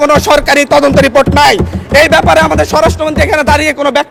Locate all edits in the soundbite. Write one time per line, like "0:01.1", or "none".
none